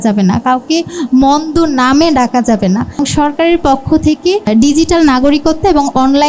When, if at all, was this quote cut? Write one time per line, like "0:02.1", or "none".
0:03.0
0:04.5